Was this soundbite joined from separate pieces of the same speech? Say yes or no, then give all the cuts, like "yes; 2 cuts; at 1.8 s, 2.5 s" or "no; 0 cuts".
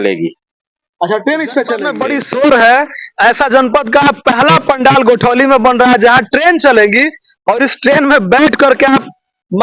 yes; 1 cut; at 1.9 s